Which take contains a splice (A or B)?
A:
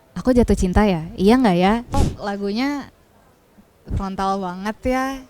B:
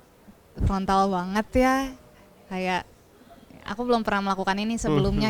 A